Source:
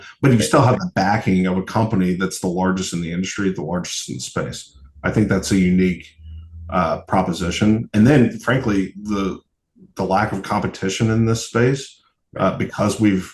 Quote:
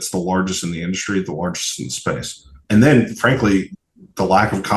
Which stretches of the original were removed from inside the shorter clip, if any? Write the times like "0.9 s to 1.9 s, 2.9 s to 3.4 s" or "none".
4.9 s to 7.9 s, 9.0 s to 9.5 s